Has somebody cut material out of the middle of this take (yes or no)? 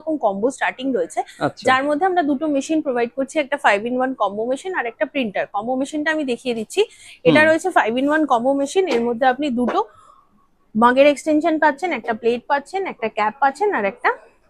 no